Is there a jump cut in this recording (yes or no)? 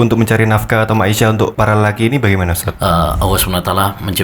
yes